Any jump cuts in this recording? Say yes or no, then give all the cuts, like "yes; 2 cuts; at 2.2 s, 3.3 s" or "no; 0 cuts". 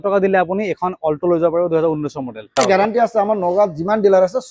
yes; 1 cut; at 2.6 s